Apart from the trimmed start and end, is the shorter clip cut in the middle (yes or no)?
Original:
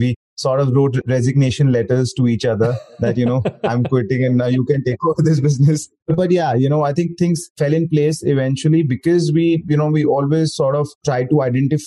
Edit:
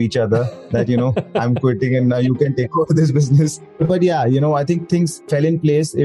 no